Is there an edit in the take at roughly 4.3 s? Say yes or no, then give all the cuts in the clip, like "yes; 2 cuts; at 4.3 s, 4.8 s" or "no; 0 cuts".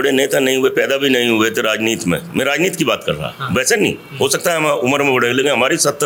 no; 0 cuts